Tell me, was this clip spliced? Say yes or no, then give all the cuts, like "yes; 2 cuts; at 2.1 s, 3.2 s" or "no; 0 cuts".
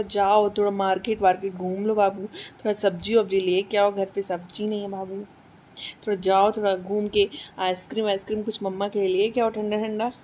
no; 0 cuts